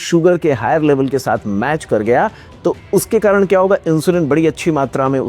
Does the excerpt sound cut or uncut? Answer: uncut